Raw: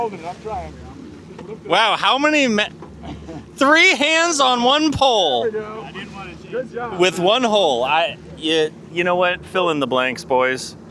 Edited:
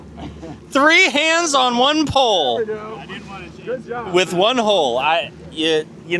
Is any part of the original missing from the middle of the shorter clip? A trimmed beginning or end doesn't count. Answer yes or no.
no